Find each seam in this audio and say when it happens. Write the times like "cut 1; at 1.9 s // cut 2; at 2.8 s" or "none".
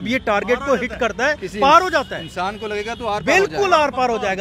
none